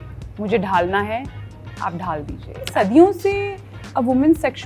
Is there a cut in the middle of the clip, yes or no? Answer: yes